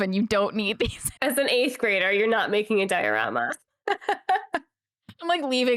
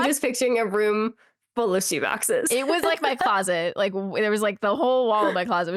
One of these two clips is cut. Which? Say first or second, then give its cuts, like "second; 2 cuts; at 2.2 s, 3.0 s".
first; 1 cut; at 1.2 s